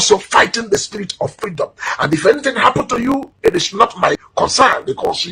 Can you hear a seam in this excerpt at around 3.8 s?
yes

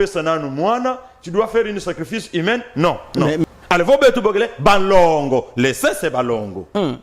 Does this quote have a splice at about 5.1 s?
no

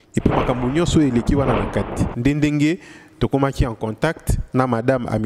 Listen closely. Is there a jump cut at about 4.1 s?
no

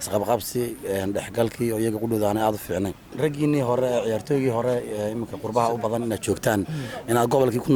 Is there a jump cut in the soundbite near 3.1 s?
yes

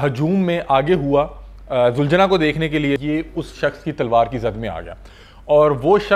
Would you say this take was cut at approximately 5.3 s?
no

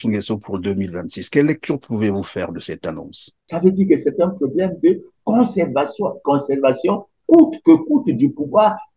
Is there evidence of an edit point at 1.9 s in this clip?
no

